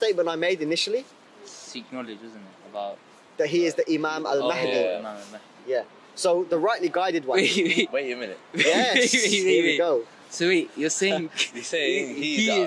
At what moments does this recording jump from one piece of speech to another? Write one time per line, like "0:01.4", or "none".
0:06.6